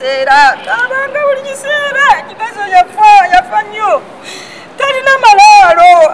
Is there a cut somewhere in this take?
no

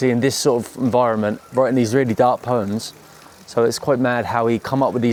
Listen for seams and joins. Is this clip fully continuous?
yes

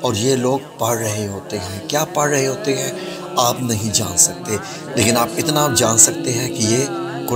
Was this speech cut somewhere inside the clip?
no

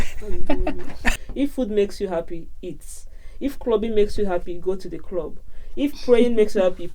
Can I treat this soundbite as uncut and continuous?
no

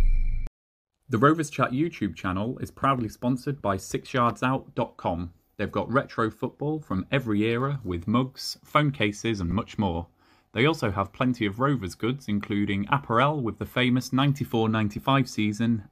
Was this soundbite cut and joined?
yes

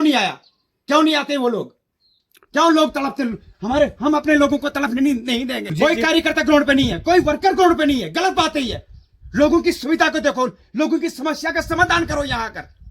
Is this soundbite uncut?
no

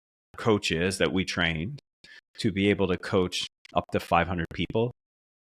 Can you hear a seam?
no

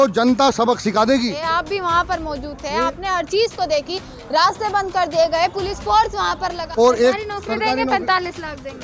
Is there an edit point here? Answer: yes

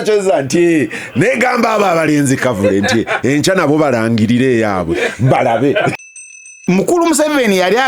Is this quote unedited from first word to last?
no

